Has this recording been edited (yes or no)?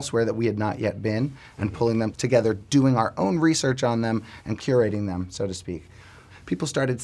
yes